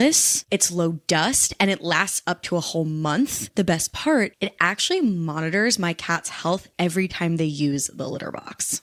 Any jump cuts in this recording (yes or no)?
no